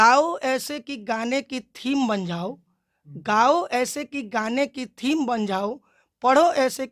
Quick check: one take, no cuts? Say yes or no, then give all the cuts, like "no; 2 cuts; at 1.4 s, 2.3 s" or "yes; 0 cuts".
yes; 0 cuts